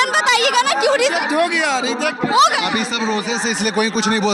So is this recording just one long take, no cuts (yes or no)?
yes